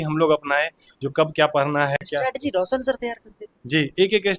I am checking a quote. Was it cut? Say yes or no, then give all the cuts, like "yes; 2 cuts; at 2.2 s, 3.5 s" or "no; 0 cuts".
no; 0 cuts